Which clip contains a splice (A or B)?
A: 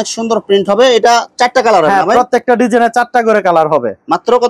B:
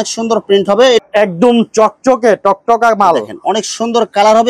B